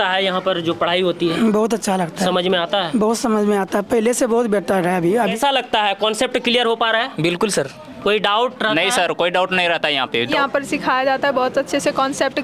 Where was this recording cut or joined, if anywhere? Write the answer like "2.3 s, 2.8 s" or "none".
5.3 s, 10.3 s